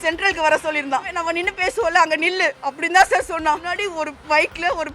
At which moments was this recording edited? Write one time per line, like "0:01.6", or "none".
0:01.1
0:03.7